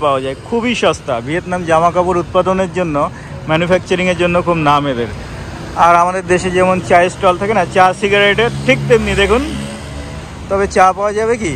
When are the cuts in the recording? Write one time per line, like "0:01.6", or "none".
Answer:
none